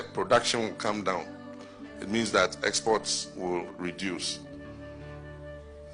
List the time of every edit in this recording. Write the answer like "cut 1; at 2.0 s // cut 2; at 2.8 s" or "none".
cut 1; at 4.5 s